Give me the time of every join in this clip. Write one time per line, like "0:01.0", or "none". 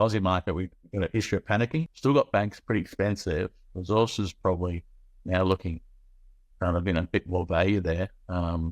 0:01.9